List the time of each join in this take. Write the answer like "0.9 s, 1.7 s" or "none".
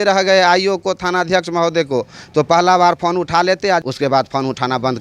3.8 s